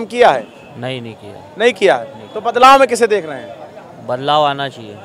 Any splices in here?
no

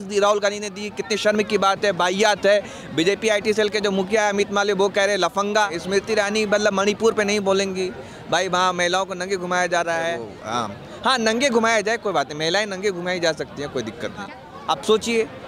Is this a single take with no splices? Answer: no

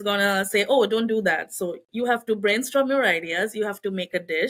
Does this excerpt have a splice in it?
no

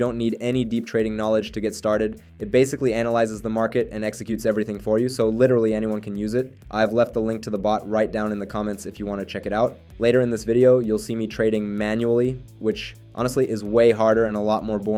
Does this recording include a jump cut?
no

